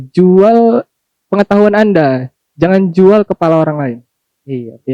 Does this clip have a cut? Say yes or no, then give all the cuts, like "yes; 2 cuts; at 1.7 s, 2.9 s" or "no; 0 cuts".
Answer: no; 0 cuts